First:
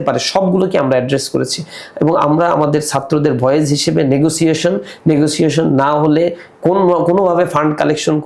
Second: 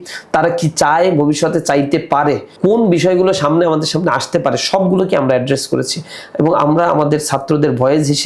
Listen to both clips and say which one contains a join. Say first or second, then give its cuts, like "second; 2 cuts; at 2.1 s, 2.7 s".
second; 1 cut; at 2.5 s